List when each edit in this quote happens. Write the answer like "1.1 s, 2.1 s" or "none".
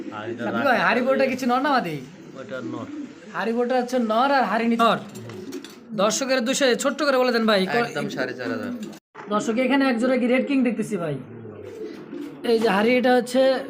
4.8 s, 8.9 s